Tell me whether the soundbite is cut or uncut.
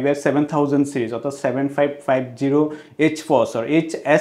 uncut